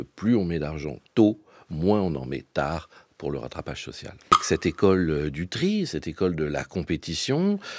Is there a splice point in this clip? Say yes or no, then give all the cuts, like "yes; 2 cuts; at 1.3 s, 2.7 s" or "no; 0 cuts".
yes; 1 cut; at 4.4 s